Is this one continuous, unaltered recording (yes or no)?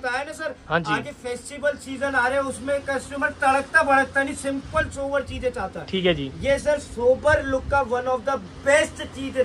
yes